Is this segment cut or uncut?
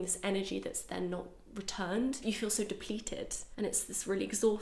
cut